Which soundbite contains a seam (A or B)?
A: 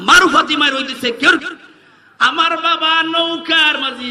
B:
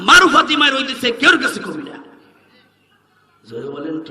A